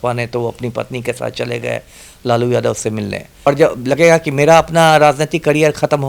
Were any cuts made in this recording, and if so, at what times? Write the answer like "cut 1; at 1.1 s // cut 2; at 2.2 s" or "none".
cut 1; at 3.5 s